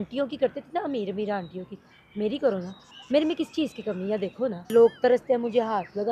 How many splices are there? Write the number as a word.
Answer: one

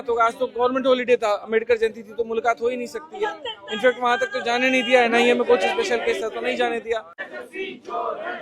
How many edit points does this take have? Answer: one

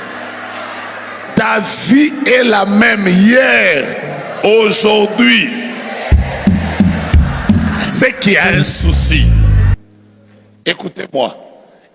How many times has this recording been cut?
one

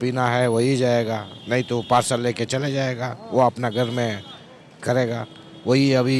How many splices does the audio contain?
zero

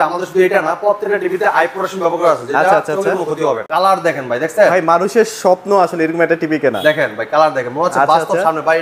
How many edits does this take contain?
one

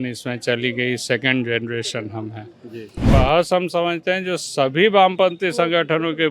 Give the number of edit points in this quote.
one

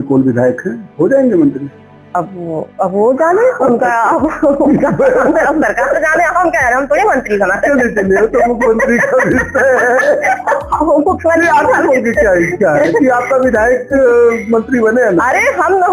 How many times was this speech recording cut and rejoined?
zero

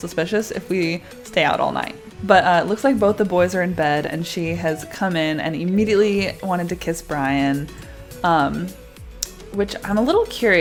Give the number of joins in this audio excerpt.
zero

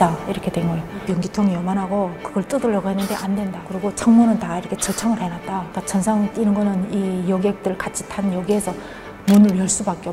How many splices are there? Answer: two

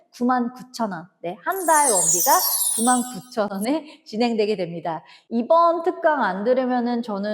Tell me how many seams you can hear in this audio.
one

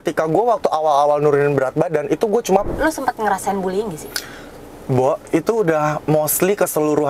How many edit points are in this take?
one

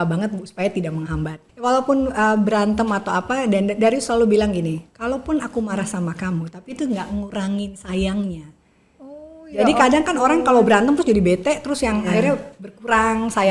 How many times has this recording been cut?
one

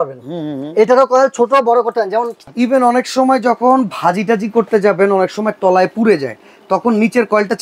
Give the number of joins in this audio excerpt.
one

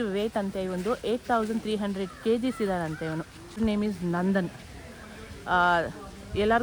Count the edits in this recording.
one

